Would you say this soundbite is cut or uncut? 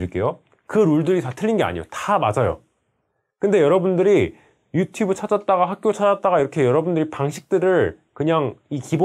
uncut